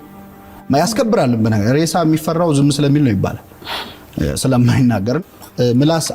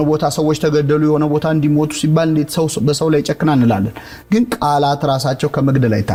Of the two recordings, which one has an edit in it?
first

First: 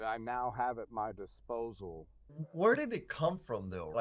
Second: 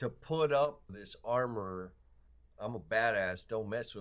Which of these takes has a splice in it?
first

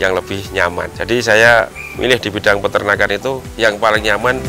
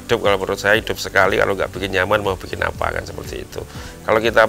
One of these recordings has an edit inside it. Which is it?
first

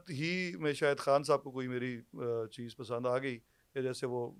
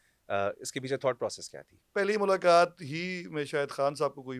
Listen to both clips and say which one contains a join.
second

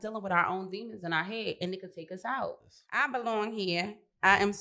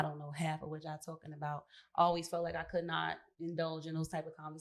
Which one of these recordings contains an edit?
first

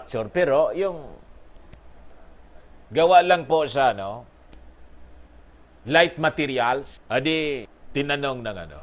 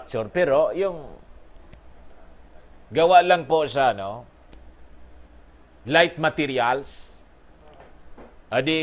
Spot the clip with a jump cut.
first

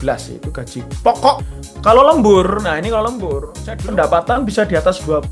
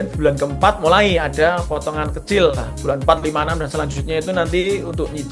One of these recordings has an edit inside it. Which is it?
first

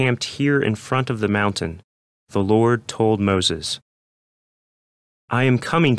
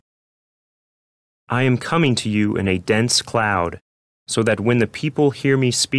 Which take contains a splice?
first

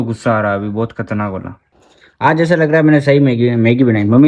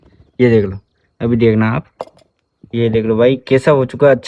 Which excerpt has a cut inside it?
first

